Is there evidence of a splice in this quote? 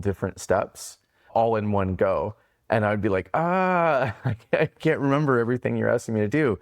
yes; 1 cut; at 1.3 s

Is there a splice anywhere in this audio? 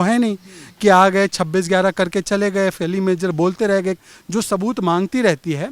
yes; 1 cut; at 4.0 s

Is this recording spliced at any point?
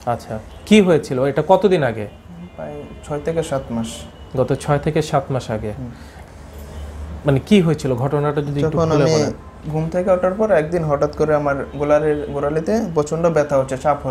no; 0 cuts

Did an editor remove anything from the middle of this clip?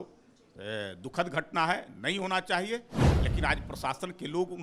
no; 0 cuts

